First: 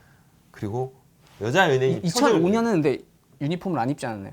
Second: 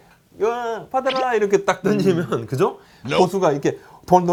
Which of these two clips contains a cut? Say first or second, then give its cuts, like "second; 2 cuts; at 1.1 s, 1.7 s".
first; 1 cut; at 1.2 s